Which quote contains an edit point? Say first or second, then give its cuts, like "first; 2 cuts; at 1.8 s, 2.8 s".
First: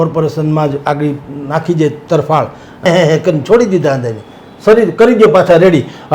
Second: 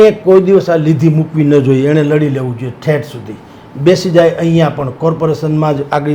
first; 1 cut; at 2.9 s